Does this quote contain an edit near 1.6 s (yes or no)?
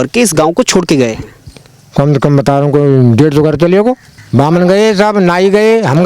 no